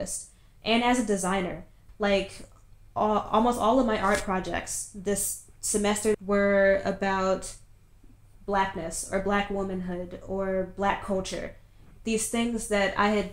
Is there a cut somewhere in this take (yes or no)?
yes